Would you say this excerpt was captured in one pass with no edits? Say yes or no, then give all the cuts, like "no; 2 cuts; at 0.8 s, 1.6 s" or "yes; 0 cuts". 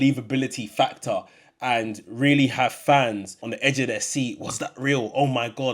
no; 1 cut; at 3.4 s